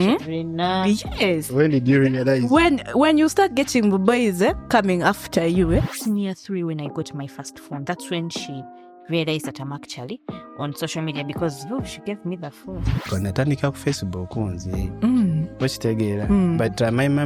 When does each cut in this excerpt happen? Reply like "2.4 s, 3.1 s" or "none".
5.9 s, 13.1 s